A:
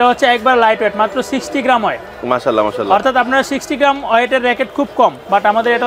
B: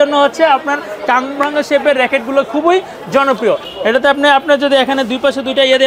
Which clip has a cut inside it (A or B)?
B